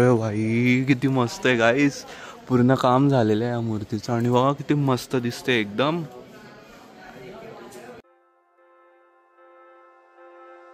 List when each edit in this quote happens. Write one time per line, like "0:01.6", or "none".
none